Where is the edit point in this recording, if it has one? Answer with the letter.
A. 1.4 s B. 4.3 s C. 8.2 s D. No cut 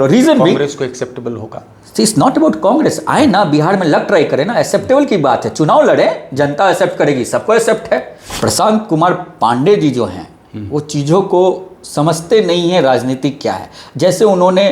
C